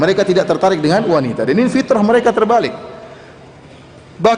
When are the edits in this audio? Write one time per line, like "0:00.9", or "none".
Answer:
none